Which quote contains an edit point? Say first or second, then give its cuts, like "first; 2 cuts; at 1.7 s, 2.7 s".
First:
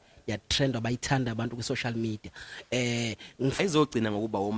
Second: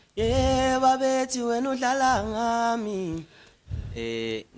first; 1 cut; at 3.6 s